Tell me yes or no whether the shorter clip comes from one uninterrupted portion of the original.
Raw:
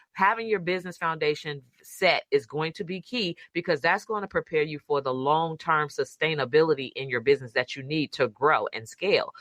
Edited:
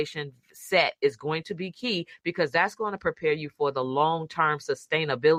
yes